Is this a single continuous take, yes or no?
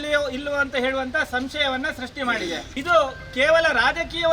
no